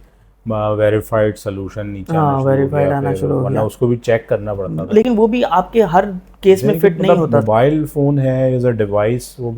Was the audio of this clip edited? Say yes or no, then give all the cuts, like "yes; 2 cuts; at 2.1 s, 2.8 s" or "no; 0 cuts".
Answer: yes; 1 cut; at 7.1 s